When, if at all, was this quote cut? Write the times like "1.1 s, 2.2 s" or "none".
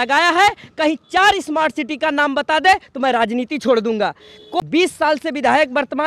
4.5 s